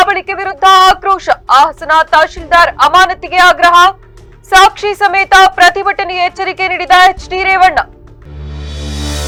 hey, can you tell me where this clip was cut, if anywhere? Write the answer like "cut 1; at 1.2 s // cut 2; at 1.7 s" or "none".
none